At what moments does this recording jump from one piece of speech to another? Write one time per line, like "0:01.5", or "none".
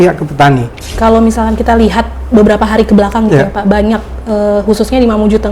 0:00.9